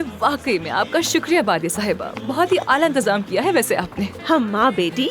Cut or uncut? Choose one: cut